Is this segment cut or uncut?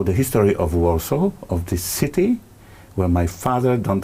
uncut